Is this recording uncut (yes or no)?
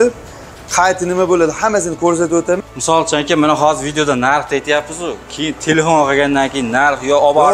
no